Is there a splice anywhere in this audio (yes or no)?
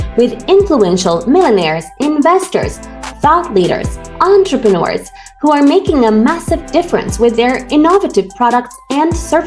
no